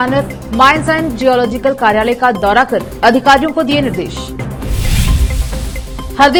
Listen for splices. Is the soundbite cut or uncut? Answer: uncut